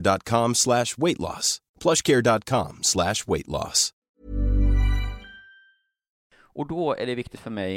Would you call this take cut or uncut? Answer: cut